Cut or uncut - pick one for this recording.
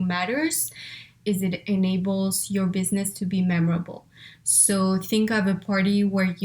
cut